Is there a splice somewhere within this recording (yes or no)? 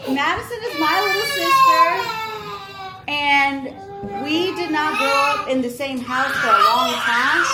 no